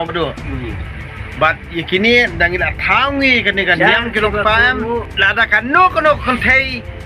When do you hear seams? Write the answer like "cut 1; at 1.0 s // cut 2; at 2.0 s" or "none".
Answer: cut 1; at 5.1 s